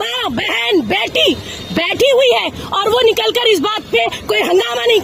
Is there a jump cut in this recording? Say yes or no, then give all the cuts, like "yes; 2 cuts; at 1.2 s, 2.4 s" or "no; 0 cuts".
no; 0 cuts